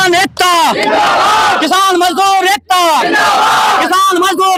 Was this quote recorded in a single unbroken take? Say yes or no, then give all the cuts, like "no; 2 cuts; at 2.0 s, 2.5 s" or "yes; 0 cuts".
yes; 0 cuts